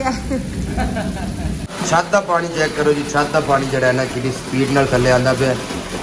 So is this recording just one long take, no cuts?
no; 1 cut; at 1.6 s

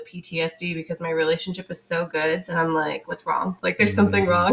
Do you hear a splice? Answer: yes; 1 cut; at 3.6 s

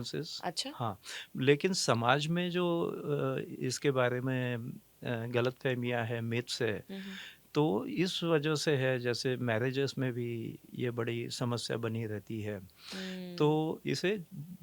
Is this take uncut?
yes; 0 cuts

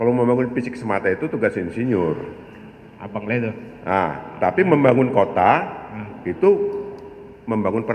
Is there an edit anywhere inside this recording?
no; 0 cuts

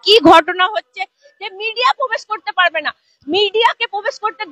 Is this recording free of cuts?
yes; 0 cuts

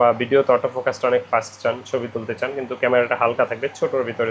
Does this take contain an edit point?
no; 0 cuts

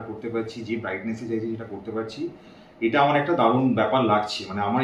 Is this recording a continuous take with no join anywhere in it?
yes; 0 cuts

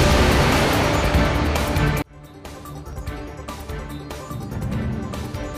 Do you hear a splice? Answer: yes; 1 cut; at 4.3 s

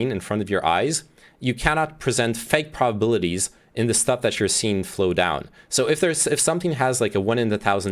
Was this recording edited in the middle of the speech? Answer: no; 0 cuts

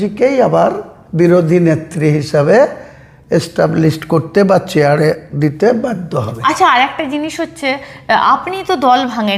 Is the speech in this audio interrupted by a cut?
no; 0 cuts

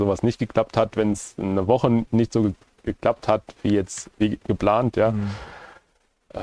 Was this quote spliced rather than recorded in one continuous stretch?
no; 0 cuts

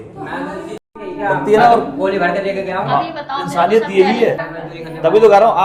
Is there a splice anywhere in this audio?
no; 0 cuts

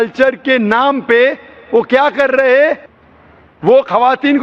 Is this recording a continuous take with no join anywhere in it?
yes; 0 cuts

